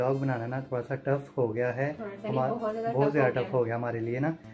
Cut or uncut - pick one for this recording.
uncut